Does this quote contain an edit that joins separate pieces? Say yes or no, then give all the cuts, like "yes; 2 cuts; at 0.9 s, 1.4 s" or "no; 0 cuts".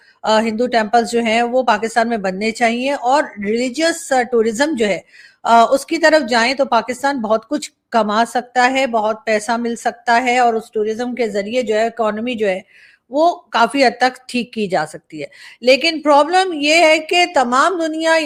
no; 0 cuts